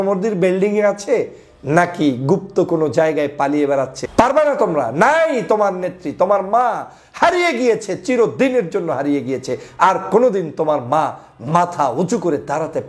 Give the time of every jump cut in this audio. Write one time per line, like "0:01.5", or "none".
0:04.0